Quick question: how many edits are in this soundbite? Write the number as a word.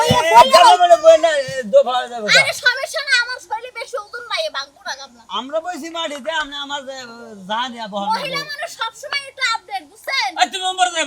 zero